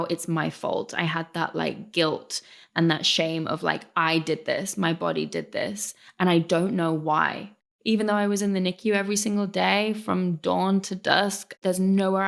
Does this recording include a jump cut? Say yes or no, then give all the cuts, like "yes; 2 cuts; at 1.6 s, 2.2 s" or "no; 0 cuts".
yes; 1 cut; at 7.7 s